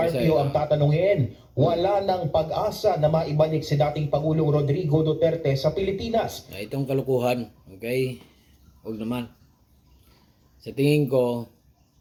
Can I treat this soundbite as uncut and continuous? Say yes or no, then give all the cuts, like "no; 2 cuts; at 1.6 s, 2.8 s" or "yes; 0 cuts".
yes; 0 cuts